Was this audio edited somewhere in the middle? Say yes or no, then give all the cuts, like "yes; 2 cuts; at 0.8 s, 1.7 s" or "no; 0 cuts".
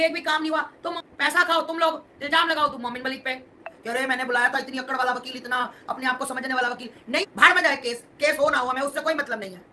yes; 3 cuts; at 0.9 s, 3.7 s, 7.2 s